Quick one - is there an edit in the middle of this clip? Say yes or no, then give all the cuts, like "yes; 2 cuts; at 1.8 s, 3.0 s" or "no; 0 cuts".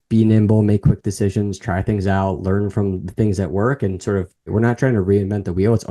yes; 1 cut; at 4.5 s